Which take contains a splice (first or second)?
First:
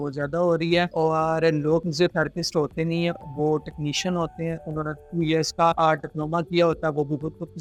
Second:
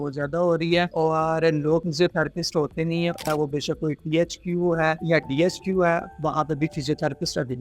second